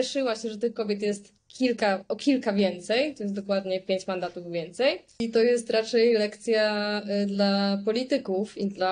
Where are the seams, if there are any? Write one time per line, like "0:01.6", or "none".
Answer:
0:05.2